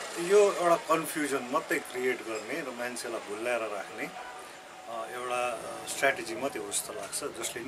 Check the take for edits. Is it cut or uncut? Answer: uncut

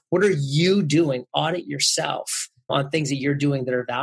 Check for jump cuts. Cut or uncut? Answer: cut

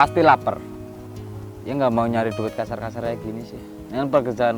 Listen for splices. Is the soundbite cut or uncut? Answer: cut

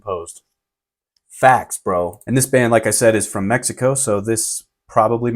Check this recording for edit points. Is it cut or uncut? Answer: cut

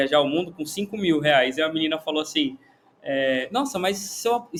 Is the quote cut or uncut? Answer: uncut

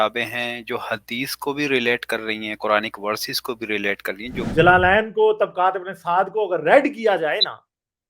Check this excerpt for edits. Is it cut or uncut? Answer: cut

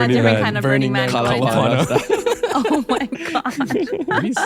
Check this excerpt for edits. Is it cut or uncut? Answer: uncut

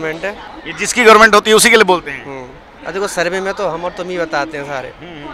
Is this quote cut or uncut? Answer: uncut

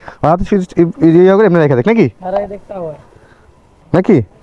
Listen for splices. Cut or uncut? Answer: uncut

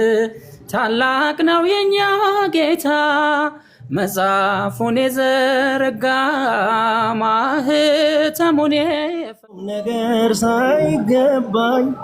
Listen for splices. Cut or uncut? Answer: cut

